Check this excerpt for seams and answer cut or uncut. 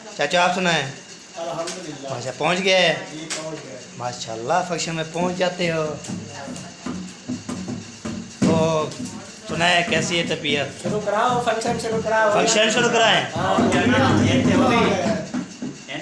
uncut